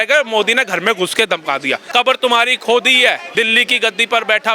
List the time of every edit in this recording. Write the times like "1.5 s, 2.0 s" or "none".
1.9 s, 3.2 s